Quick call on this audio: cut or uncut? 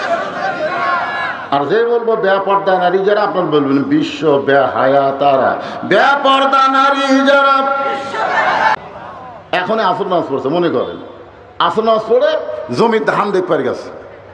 cut